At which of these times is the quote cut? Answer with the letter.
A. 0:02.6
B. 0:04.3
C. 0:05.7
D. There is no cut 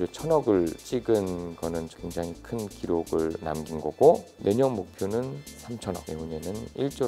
B